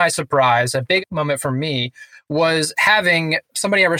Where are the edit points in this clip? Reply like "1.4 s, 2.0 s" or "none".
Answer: 1.0 s